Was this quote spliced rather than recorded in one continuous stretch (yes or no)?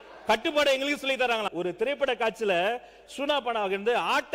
yes